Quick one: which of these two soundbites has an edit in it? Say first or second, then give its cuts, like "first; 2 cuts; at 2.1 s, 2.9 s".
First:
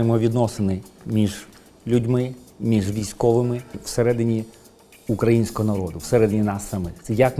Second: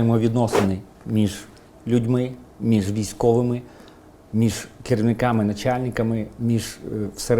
first; 1 cut; at 3.8 s